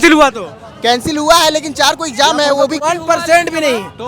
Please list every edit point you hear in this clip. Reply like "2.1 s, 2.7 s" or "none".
2.8 s